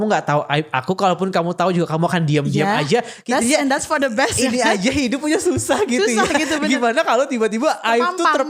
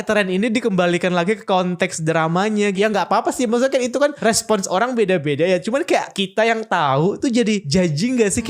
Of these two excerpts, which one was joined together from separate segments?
second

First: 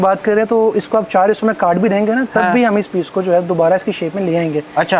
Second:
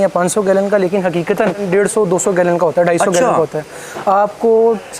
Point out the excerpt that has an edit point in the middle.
second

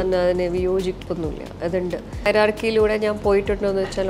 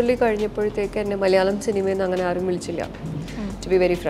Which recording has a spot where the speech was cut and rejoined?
first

